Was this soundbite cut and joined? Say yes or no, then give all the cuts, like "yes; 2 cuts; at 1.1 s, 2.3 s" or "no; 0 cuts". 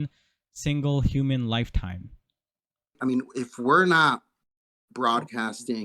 yes; 1 cut; at 3.0 s